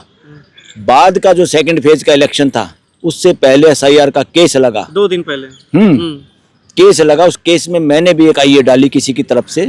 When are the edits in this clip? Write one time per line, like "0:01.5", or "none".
none